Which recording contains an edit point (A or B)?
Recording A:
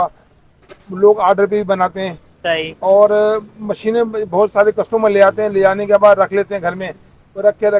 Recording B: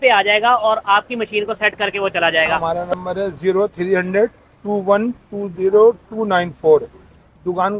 B